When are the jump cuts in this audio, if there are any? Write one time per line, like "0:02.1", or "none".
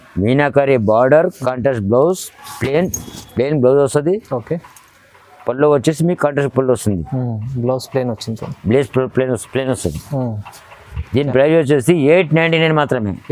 none